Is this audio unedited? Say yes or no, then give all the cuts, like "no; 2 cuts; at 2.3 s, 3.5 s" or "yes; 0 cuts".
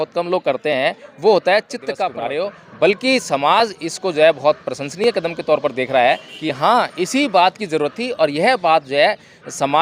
no; 1 cut; at 2.1 s